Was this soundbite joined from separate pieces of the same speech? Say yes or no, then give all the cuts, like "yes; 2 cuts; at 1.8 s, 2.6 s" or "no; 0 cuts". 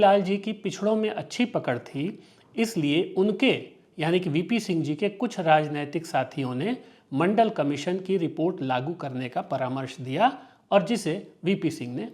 no; 0 cuts